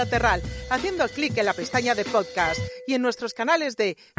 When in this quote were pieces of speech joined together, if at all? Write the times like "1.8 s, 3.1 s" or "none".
none